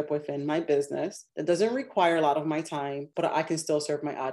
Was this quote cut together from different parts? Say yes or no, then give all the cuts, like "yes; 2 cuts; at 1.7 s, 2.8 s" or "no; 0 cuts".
yes; 2 cuts; at 1.2 s, 3.0 s